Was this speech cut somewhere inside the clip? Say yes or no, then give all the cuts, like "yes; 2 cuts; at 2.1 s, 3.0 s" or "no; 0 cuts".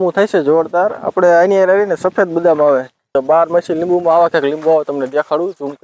yes; 1 cut; at 3.2 s